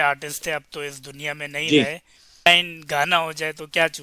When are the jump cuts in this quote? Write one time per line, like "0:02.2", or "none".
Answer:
0:02.5